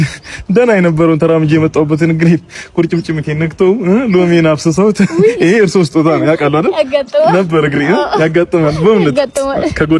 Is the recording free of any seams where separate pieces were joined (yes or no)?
no